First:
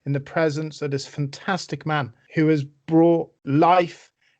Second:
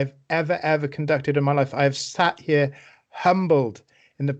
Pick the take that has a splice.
first; 2 cuts; at 2.2 s, 3.4 s

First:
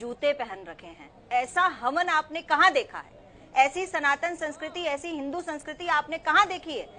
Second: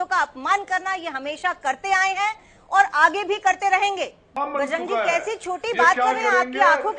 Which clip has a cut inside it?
second; 1 cut; at 4.4 s

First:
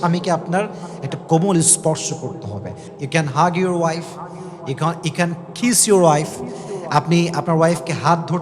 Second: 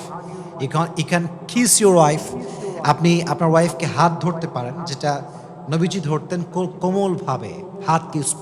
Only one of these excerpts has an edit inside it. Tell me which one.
first; 1 cut; at 2.9 s

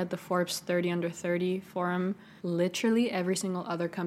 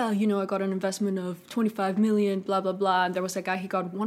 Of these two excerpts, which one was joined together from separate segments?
first; 1 cut; at 2.3 s

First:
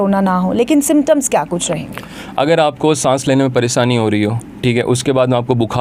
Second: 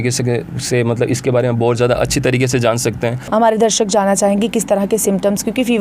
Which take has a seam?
second; 1 cut; at 3.2 s

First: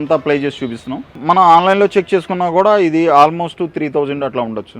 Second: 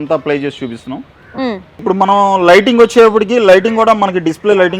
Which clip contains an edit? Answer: first; 1 cut; at 1.2 s

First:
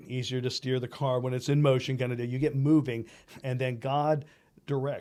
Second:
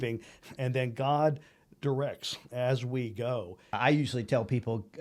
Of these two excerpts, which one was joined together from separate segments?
second; 1 cut; at 3.8 s

